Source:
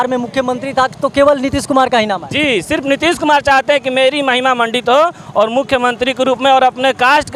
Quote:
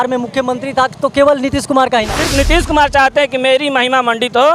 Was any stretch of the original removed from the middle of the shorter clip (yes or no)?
yes